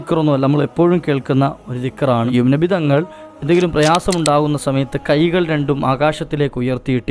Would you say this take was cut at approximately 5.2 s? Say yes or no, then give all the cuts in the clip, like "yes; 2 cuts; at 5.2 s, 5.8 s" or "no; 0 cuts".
no; 1 cut; at 2.3 s